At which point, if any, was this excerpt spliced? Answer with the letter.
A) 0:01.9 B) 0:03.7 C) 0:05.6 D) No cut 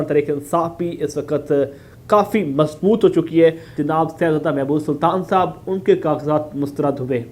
B